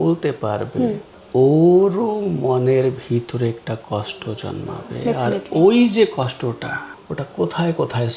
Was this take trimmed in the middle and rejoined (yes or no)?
yes